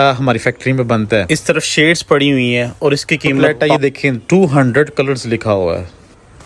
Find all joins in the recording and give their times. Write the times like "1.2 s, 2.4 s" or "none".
1.3 s, 3.5 s